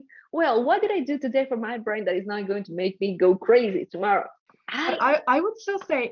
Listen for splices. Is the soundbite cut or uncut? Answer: uncut